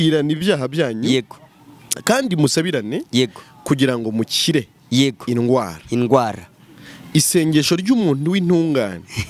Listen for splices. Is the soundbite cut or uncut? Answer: uncut